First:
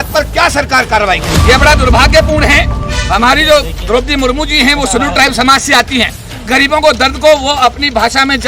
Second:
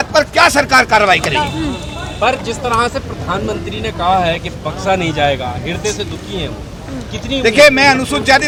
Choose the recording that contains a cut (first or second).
first